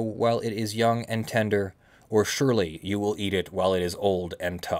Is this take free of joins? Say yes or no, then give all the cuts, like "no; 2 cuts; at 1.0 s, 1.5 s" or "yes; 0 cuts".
yes; 0 cuts